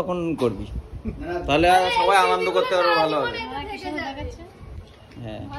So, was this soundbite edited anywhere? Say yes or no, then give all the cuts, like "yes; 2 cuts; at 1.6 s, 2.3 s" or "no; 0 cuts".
no; 0 cuts